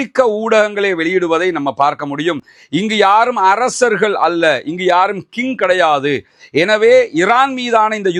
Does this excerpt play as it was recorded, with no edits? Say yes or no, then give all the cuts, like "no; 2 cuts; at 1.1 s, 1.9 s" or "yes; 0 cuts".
yes; 0 cuts